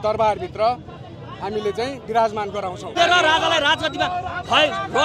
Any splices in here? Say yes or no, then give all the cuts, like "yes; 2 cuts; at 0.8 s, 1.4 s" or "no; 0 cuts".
yes; 1 cut; at 3.0 s